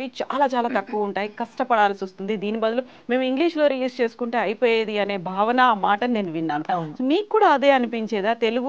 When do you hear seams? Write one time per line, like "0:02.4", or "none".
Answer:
none